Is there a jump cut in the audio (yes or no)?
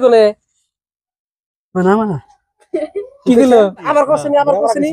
yes